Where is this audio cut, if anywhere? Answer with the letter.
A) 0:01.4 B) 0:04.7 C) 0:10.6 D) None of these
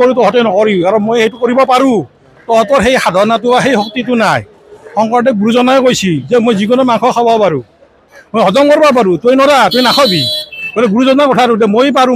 D